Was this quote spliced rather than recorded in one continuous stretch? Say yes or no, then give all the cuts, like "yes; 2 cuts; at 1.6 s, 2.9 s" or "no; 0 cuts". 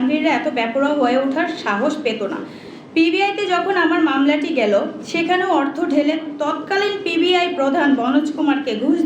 no; 0 cuts